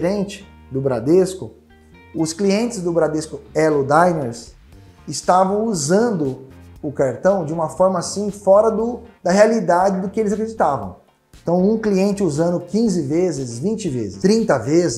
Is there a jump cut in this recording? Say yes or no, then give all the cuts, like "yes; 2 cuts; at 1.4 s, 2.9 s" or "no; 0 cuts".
yes; 1 cut; at 14.1 s